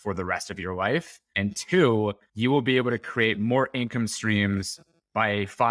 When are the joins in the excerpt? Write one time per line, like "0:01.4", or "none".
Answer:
0:01.2
0:02.2